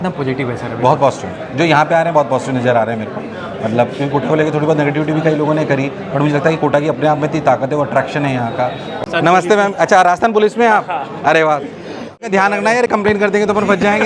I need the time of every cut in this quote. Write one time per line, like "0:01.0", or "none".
0:08.9
0:12.2